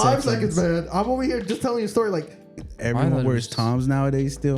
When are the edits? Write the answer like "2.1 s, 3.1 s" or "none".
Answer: 2.6 s